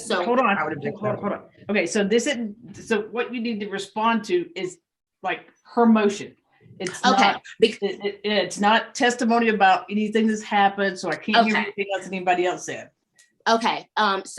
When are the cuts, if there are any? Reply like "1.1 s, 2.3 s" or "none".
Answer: none